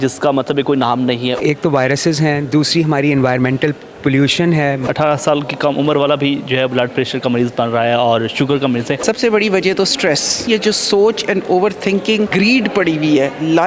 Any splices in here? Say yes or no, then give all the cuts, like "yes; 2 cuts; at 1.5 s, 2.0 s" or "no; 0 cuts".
yes; 5 cuts; at 1.4 s, 4.9 s, 8.9 s, 10.5 s, 12.3 s